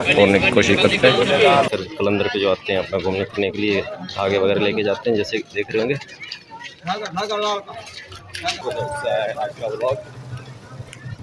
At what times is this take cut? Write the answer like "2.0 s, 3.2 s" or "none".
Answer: 1.7 s, 8.6 s